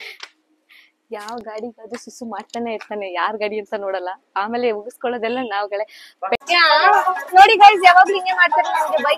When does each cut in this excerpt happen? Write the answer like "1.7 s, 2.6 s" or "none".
6.3 s